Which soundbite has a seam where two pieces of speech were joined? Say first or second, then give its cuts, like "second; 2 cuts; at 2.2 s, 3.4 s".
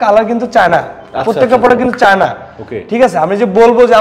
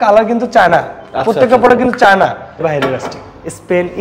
second; 1 cut; at 2.7 s